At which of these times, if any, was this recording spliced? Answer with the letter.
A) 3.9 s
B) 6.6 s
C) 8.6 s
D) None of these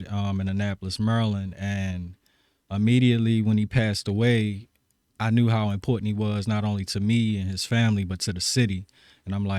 D